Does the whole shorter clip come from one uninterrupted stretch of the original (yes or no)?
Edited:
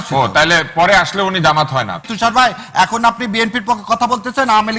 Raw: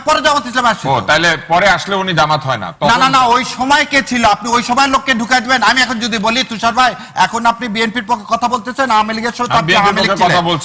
no